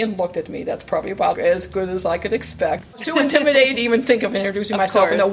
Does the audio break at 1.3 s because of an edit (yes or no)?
no